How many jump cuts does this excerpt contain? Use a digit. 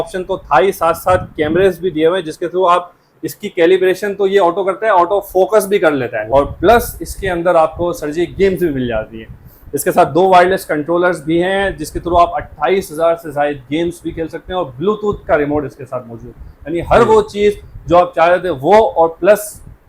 1